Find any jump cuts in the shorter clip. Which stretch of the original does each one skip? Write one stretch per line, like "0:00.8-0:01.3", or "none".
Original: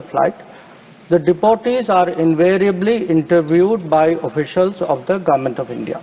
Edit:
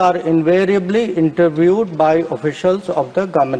none